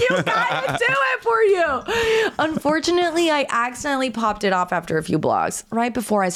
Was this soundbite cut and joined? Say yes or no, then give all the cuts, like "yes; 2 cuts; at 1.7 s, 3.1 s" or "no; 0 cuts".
no; 0 cuts